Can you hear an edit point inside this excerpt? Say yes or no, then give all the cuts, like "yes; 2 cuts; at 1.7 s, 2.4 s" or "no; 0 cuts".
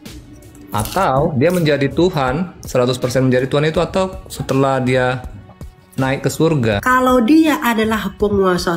yes; 1 cut; at 6.8 s